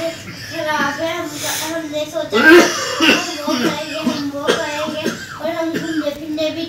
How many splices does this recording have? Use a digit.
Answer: 0